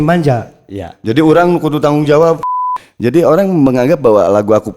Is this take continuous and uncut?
no; 1 cut; at 2.4 s

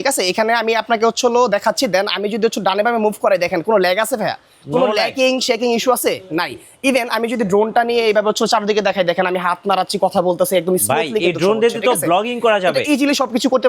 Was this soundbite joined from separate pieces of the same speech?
no; 0 cuts

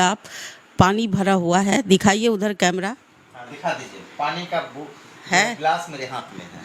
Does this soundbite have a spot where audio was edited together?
no; 0 cuts

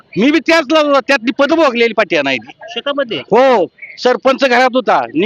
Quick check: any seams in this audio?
no; 0 cuts

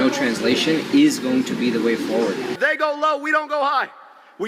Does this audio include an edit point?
yes; 1 cut; at 2.5 s

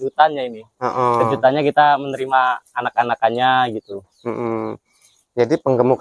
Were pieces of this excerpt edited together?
no; 0 cuts

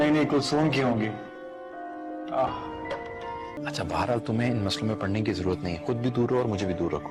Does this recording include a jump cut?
yes; 1 cut; at 3.5 s

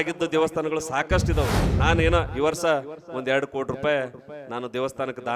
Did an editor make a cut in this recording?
yes; 1 cut; at 1.7 s

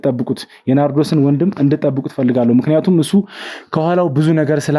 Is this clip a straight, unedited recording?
yes; 0 cuts

